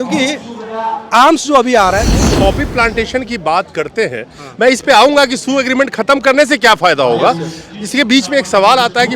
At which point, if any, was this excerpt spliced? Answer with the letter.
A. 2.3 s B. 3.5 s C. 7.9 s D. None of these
A